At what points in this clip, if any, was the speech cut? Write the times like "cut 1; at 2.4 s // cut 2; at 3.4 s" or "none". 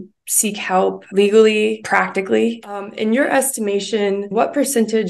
cut 1; at 1.0 s // cut 2; at 1.8 s // cut 3; at 2.9 s // cut 4; at 4.3 s